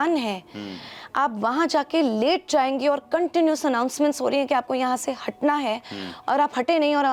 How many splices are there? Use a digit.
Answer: 0